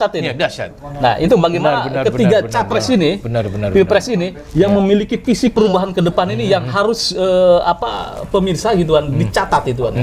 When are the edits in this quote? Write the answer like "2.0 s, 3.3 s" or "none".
none